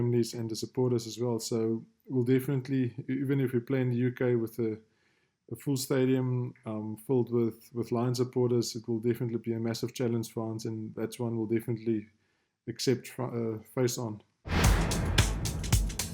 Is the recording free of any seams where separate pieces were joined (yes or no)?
no